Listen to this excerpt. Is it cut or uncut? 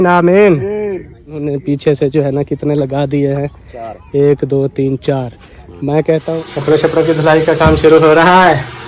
cut